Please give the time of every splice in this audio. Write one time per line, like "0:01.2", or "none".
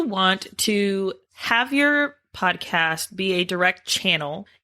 0:01.3

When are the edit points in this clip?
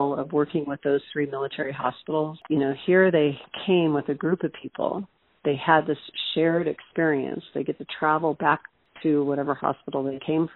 0:02.4
0:08.8

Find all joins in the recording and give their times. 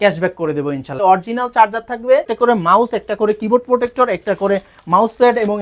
0:01.0
0:02.3

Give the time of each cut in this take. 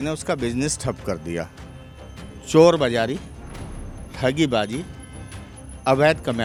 none

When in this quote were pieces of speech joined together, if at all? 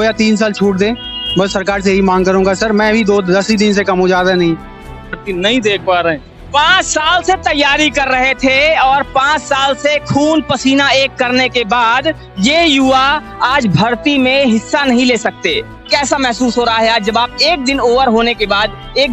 0:05.2
0:15.8

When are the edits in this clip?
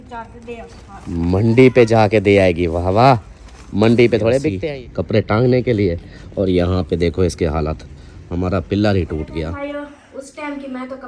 0:04.5
0:09.5

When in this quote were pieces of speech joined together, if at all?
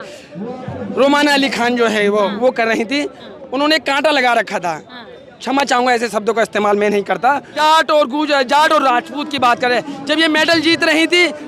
0:07.5

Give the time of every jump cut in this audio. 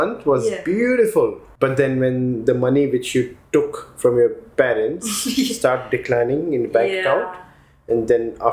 0:01.4

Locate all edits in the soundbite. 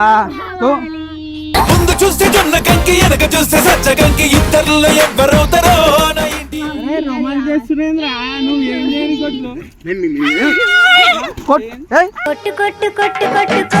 none

